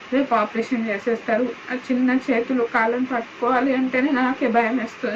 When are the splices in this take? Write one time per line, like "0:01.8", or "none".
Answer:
none